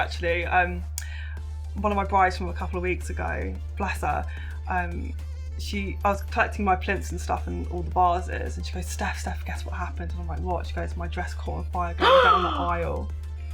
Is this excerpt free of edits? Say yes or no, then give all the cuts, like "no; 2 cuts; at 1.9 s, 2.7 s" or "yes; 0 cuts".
yes; 0 cuts